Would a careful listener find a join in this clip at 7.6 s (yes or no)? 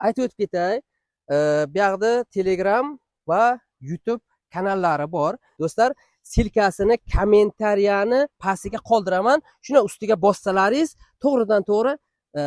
no